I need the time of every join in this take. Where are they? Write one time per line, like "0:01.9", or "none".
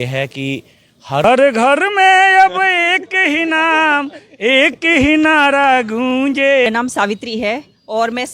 0:01.2
0:06.7